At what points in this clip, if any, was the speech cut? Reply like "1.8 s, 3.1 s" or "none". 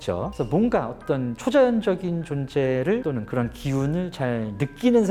none